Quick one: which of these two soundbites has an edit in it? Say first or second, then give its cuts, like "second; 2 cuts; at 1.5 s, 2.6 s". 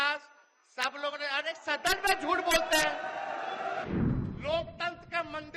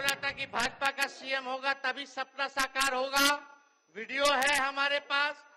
first; 1 cut; at 3.8 s